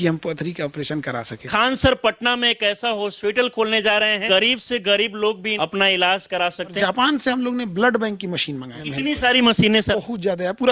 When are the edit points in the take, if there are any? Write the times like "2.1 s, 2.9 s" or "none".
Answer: 1.4 s, 4.2 s, 5.5 s, 6.8 s, 8.8 s, 9.9 s